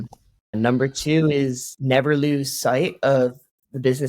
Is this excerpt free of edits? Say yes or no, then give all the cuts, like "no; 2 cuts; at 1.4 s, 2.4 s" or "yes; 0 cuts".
no; 1 cut; at 1.7 s